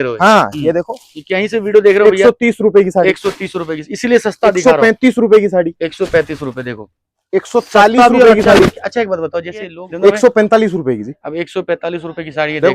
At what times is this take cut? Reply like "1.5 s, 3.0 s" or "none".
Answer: 9.8 s